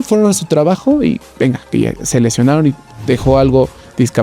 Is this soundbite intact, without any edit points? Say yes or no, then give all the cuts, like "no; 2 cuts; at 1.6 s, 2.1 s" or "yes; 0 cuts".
yes; 0 cuts